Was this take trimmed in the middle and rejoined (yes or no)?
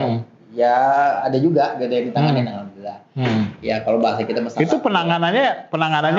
no